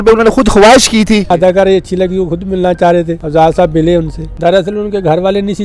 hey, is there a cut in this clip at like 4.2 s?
yes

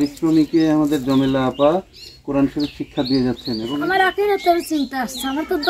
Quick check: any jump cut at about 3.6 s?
yes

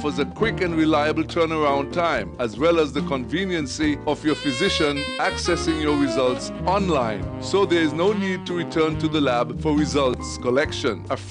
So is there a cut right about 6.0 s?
no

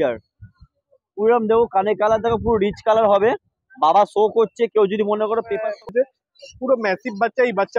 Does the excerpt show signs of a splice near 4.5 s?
no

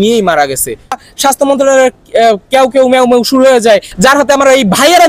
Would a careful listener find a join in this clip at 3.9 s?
yes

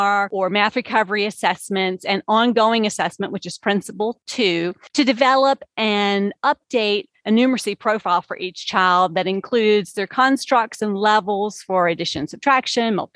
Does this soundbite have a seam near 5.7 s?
no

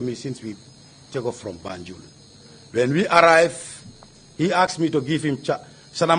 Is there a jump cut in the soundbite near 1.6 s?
yes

